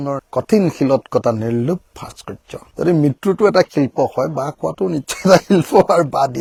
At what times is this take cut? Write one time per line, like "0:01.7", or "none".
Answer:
none